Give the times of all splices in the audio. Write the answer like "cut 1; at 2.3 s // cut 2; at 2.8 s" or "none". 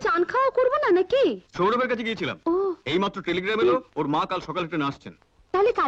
cut 1; at 1.5 s